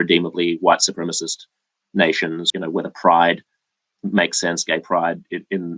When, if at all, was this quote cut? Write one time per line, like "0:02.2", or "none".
0:02.4

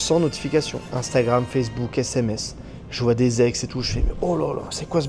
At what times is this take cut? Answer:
none

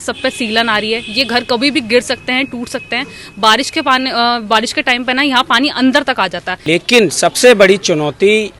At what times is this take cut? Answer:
0:06.6

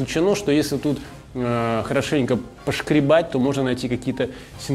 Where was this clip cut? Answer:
none

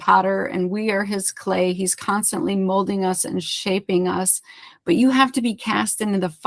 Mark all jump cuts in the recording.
none

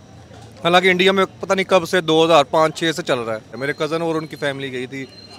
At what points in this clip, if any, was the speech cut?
0:03.6

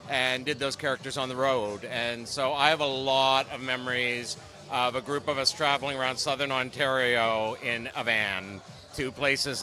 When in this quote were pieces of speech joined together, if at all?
none

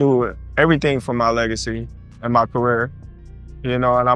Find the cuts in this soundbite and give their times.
none

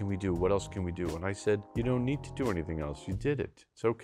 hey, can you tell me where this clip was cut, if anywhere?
none

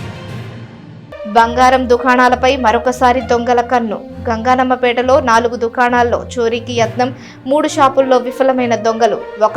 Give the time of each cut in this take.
0:01.0

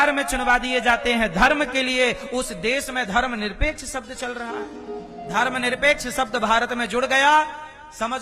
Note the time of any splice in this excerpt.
0:05.2

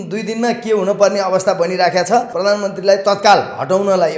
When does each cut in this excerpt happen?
0:02.3

